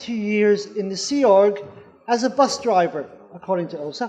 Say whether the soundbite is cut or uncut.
cut